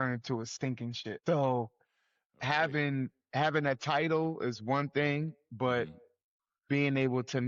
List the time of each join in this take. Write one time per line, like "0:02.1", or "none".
0:01.1